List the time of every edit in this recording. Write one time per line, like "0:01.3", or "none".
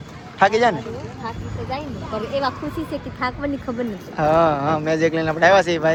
none